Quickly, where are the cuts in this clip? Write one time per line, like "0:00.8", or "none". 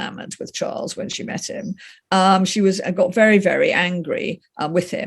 none